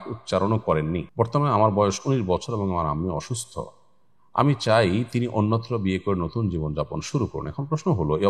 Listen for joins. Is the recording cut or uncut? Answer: cut